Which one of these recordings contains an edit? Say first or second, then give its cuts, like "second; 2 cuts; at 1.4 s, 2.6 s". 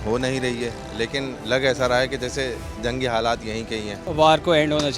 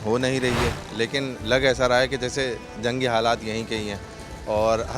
first; 1 cut; at 4.0 s